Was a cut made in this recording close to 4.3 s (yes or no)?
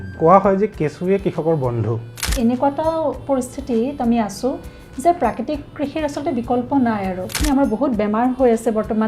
no